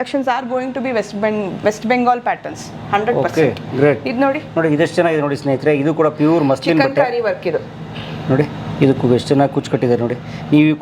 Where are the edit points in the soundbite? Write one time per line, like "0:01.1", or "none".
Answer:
none